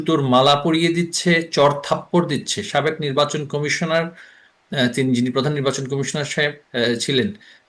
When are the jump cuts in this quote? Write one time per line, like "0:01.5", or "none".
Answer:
none

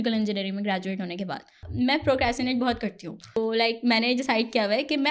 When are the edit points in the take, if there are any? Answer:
0:01.6
0:03.4

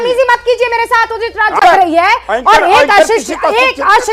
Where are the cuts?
0:01.6

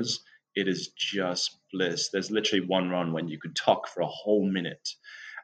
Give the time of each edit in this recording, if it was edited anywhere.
0:03.4

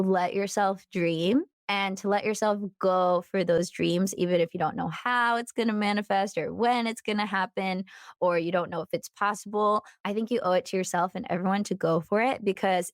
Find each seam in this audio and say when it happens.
0:01.6
0:09.9

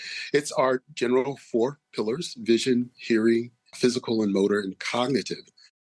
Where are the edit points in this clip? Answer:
0:03.6

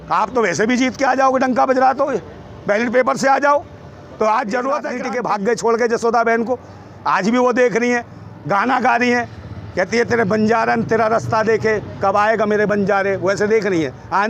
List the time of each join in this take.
0:05.0

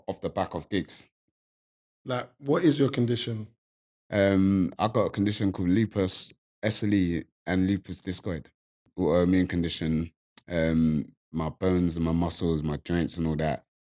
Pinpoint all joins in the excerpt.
0:01.6
0:08.9

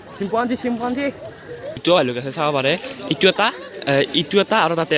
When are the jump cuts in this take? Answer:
0:01.8

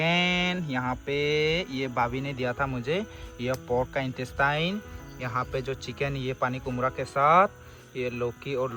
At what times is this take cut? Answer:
none

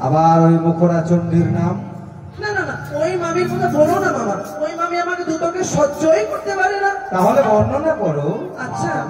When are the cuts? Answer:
none

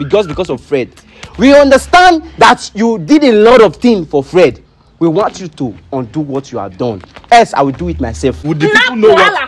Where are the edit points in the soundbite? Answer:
0:08.4

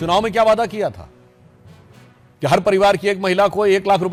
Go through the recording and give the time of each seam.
none

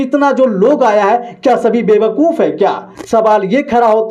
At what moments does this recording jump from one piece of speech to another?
0:02.9

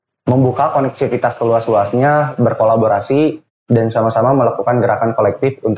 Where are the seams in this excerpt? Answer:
none

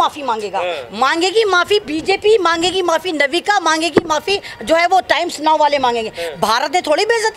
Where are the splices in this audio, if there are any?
none

